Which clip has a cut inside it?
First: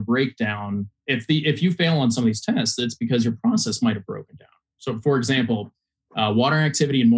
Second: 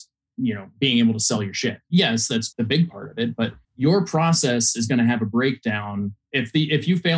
second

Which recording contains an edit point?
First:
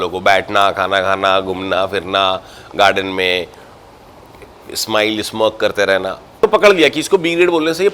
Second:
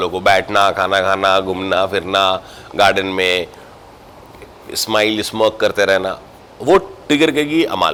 first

